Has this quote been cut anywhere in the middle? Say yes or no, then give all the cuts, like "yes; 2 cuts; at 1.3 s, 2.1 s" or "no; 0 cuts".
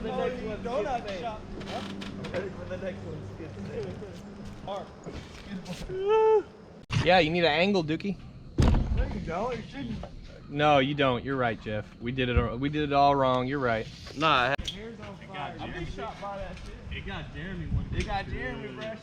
yes; 3 cuts; at 4.7 s, 7.0 s, 14.6 s